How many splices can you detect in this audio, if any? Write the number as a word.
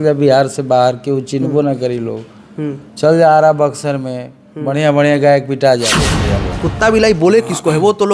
one